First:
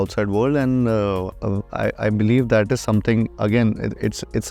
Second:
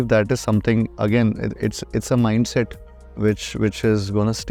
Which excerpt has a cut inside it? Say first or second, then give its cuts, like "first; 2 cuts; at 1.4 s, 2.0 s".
first; 1 cut; at 1.3 s